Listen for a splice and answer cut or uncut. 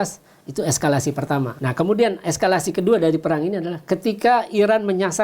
cut